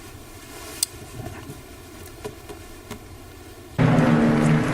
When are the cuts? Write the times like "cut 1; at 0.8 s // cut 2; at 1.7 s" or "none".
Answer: cut 1; at 3.7 s